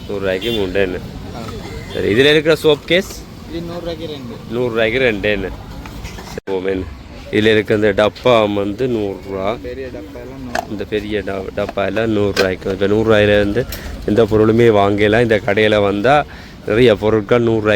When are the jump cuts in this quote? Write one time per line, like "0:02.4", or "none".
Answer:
0:06.2